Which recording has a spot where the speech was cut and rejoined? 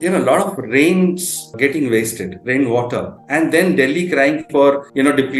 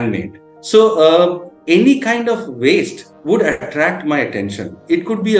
second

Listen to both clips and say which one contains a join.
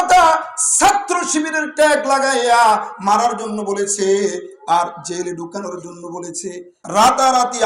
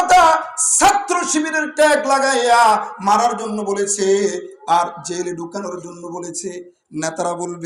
first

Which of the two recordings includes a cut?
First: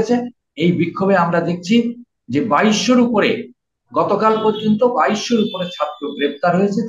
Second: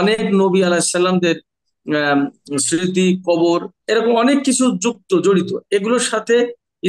second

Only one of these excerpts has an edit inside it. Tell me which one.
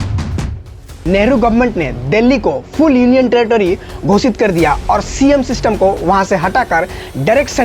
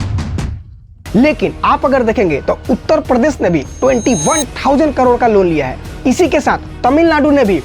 first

